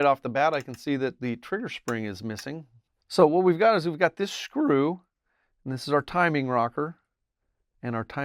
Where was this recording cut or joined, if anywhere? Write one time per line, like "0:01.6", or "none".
0:02.8